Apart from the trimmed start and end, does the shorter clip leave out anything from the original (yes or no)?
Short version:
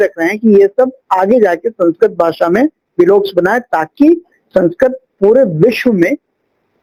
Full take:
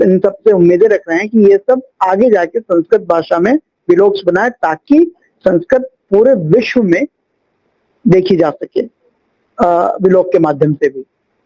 no